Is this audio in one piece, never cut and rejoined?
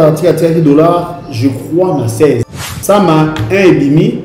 no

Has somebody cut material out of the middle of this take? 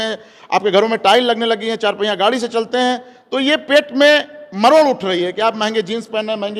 no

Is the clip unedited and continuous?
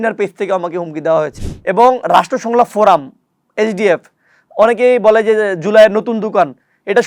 no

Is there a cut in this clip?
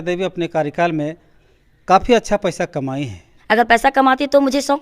yes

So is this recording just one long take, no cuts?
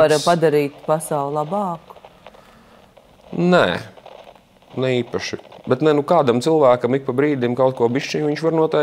yes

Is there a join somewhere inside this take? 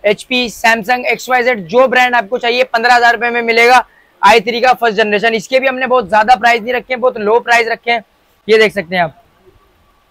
no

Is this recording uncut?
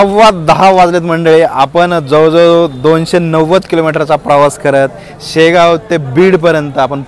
yes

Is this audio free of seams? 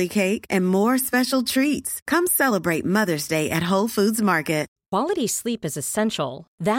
no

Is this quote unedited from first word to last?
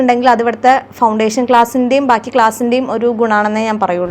yes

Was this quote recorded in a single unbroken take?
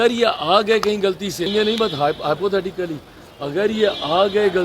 no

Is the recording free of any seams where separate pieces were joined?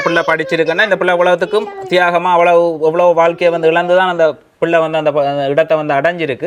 yes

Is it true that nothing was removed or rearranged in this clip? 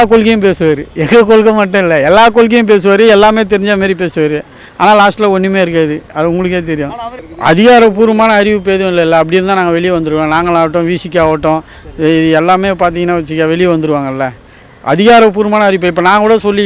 no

